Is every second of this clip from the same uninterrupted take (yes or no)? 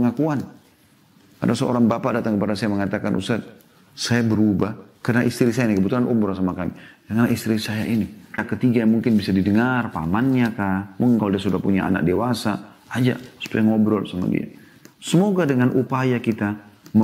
no